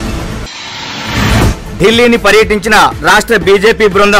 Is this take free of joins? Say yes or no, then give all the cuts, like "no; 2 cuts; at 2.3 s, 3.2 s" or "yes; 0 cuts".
no; 1 cut; at 1.5 s